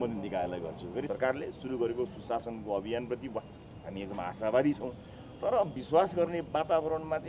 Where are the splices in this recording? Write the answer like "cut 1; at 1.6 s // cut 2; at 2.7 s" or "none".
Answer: cut 1; at 1.1 s